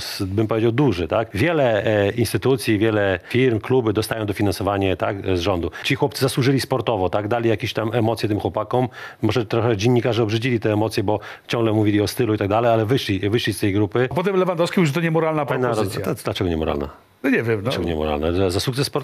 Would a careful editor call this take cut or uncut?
cut